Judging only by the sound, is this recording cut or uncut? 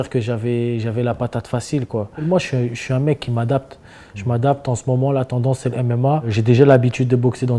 cut